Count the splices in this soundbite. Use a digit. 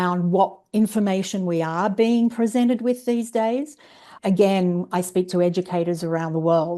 1